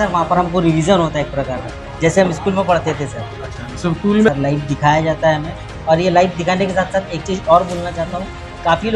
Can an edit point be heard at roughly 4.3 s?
yes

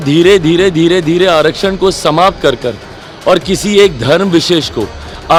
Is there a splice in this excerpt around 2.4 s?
no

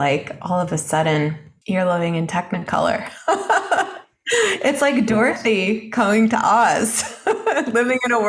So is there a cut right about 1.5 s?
yes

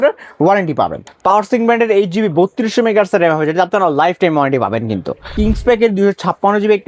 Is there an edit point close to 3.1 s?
no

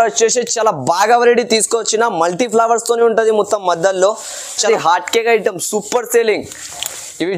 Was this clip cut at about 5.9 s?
no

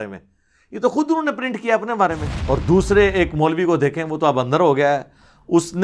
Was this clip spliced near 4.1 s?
no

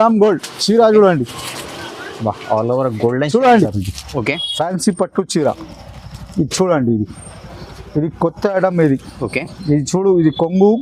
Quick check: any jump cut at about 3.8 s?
yes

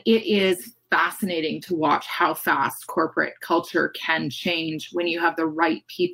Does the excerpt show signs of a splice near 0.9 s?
no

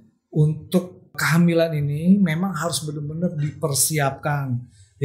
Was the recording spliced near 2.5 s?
no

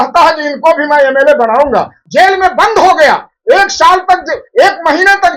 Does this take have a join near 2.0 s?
yes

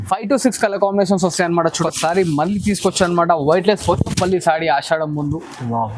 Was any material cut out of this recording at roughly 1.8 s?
yes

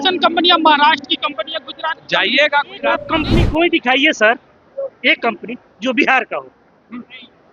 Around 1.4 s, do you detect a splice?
no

